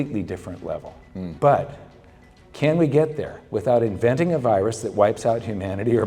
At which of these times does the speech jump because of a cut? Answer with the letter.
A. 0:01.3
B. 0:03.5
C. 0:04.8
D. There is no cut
A